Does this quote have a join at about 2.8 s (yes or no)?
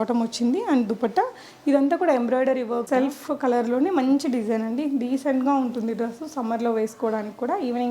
yes